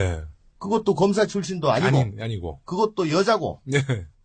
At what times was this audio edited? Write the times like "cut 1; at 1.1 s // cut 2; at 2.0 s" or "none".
cut 1; at 3.2 s

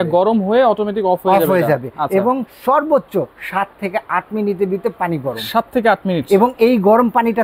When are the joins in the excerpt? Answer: none

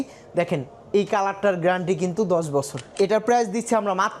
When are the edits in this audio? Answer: cut 1; at 2.8 s

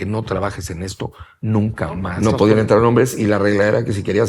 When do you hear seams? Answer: cut 1; at 2.1 s

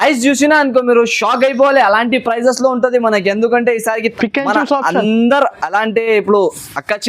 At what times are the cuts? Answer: cut 1; at 4.1 s

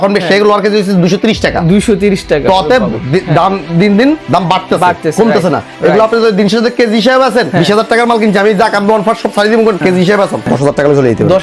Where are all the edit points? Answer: cut 1; at 7.5 s // cut 2; at 10.0 s

